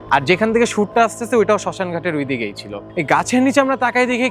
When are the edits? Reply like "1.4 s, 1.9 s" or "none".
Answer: 2.7 s